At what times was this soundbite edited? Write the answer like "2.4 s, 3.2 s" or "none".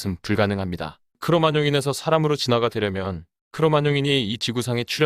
1.1 s